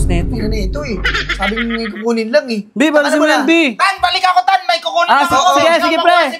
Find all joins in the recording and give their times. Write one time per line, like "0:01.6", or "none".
none